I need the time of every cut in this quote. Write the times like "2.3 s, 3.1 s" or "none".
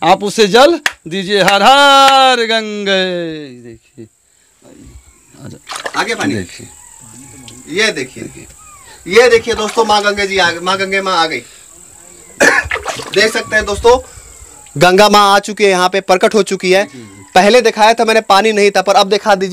none